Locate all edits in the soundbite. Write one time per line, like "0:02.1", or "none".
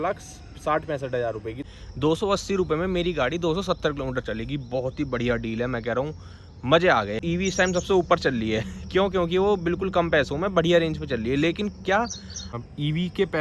0:01.6
0:07.2
0:12.5